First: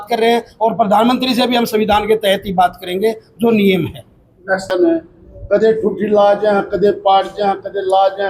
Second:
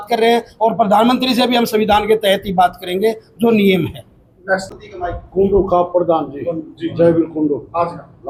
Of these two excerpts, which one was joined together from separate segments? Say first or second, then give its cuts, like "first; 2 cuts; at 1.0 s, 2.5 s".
first; 1 cut; at 4.7 s